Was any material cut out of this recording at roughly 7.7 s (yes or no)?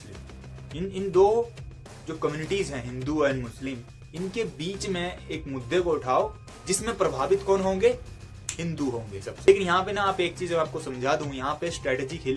no